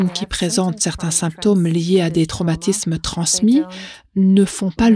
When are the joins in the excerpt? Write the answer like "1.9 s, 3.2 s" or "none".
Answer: none